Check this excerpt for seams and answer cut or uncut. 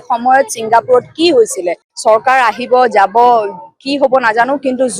cut